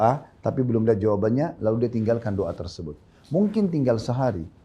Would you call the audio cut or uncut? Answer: uncut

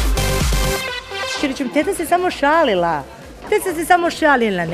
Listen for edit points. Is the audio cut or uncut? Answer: cut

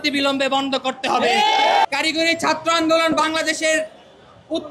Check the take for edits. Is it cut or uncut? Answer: cut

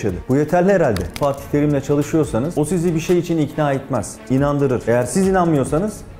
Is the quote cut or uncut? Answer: cut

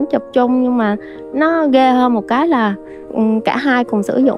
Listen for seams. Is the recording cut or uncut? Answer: uncut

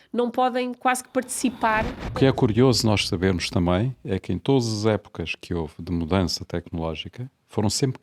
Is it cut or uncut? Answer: cut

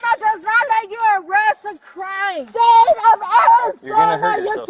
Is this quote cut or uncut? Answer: cut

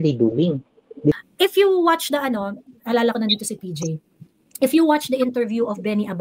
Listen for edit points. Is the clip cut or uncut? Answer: cut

